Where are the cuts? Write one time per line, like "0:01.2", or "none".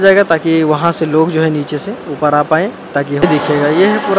0:03.2